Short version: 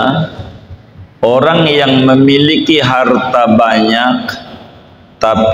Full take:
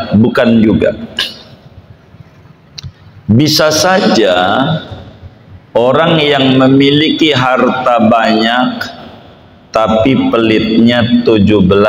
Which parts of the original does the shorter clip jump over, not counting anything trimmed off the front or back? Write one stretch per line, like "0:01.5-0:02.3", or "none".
none